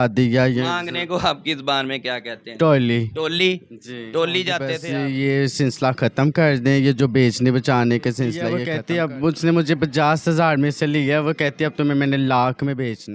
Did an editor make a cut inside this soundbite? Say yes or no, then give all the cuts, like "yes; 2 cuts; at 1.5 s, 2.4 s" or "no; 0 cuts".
yes; 2 cuts; at 4.8 s, 8.6 s